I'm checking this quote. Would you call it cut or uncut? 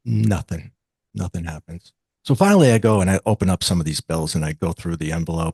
uncut